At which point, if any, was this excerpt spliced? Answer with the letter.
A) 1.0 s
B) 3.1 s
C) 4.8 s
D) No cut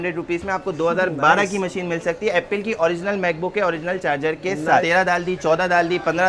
C